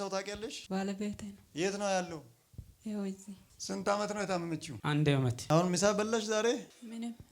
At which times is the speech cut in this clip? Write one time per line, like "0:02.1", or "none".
0:01.4
0:03.4
0:05.4